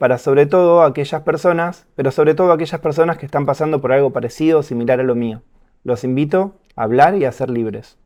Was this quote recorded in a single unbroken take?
yes; 0 cuts

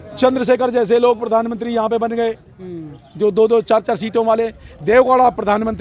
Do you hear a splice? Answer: no; 0 cuts

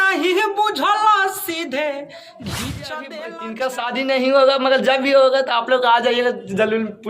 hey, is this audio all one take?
no; 1 cut; at 3.6 s

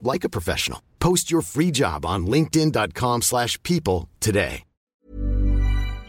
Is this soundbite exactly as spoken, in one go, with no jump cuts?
no; 1 cut; at 4.9 s

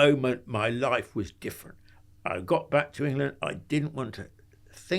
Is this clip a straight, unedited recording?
yes; 0 cuts

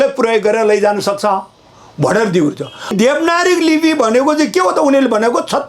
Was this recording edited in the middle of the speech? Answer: yes; 1 cut; at 2.9 s

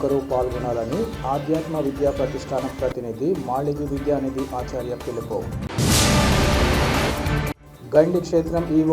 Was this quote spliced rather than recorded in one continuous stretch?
no; 0 cuts

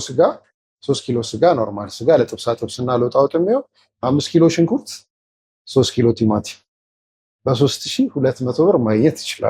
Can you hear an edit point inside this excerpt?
no; 0 cuts

